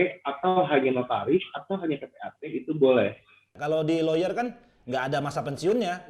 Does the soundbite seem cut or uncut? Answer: cut